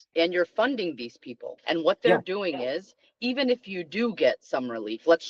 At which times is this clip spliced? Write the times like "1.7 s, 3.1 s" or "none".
1.6 s